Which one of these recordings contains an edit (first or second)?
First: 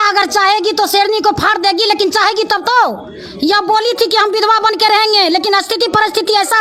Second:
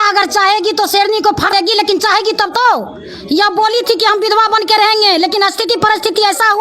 second